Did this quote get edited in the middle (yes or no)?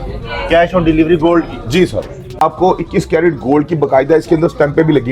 yes